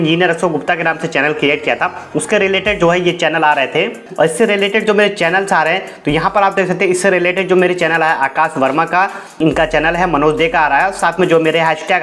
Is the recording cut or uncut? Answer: cut